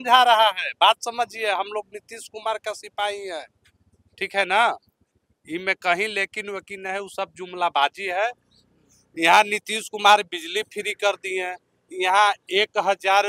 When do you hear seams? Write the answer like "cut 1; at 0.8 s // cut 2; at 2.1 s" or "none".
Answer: none